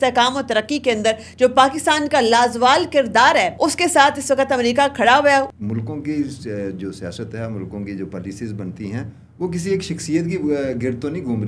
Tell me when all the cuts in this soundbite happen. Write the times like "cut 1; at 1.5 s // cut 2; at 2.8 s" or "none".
cut 1; at 3.5 s // cut 2; at 5.6 s